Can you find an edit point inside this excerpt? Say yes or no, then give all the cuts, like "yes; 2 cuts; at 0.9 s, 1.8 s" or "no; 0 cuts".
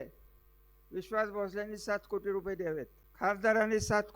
yes; 1 cut; at 3.0 s